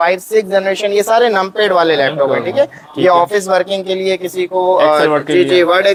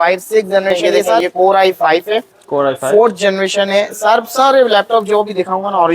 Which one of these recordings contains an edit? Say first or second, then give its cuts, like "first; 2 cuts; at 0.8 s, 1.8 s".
second; 1 cut; at 1.2 s